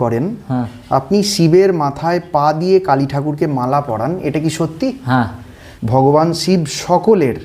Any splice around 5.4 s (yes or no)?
yes